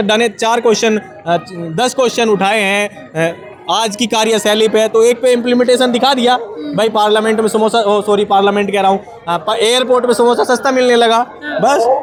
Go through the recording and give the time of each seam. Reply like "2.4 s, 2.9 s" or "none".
none